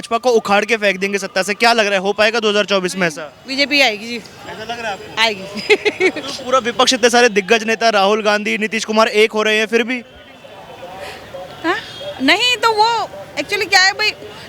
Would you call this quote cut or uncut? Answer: uncut